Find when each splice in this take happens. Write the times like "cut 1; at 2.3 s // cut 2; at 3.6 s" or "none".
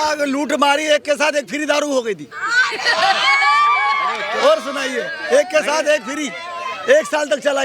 none